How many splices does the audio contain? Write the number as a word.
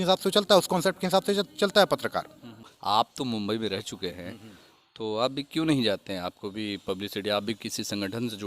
one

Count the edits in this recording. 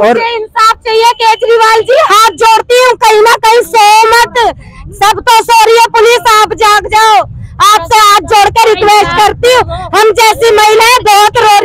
zero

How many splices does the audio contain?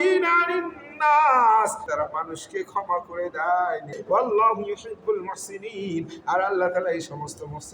two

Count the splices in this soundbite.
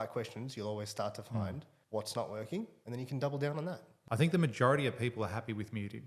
three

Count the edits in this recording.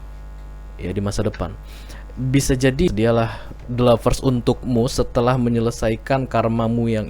one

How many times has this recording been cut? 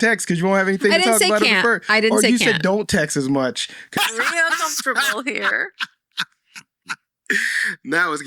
one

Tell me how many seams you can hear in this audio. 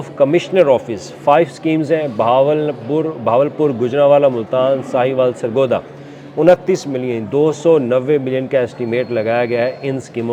zero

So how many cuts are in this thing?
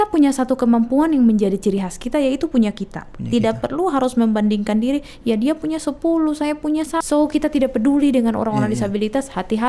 one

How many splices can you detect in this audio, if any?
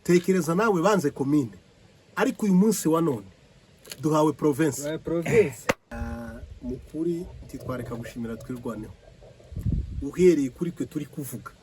one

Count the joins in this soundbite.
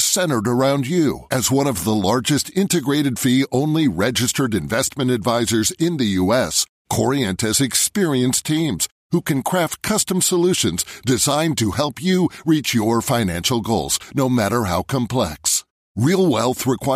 zero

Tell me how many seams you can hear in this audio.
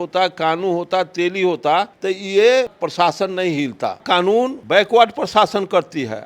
two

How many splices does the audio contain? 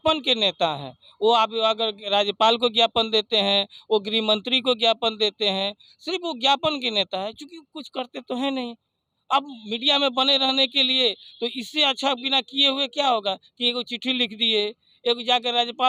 zero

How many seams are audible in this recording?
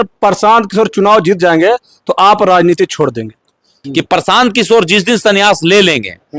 one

